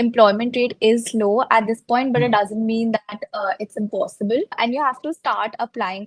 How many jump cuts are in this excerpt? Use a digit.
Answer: 1